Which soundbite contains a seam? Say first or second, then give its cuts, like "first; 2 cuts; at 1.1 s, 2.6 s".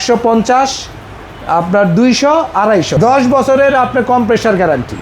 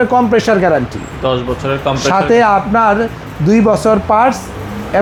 first; 1 cut; at 2.9 s